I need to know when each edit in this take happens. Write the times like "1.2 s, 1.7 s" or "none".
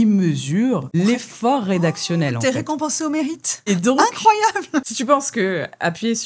0.9 s, 3.7 s